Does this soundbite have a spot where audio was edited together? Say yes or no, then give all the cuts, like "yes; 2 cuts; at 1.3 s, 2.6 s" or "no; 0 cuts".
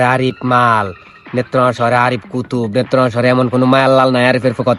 no; 0 cuts